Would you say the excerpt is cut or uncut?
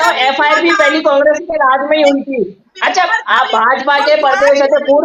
uncut